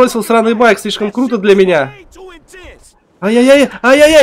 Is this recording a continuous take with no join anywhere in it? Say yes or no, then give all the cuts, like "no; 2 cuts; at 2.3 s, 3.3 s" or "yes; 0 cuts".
yes; 0 cuts